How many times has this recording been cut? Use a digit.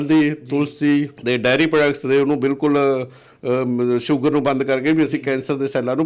1